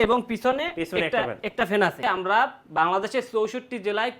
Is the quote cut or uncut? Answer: cut